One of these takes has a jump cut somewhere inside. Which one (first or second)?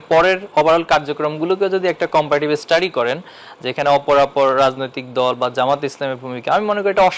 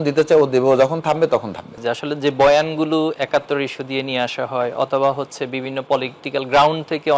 second